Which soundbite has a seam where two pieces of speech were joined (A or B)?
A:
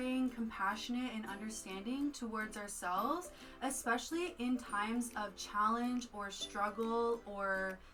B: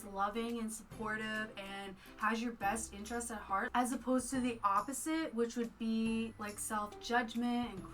B